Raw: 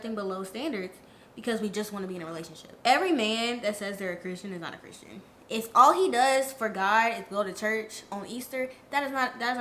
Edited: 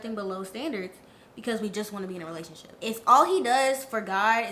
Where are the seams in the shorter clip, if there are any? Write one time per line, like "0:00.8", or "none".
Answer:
0:02.6